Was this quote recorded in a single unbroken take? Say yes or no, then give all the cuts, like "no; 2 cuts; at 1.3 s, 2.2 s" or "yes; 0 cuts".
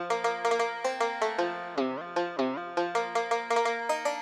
yes; 0 cuts